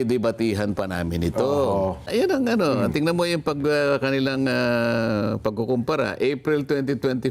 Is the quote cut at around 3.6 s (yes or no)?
no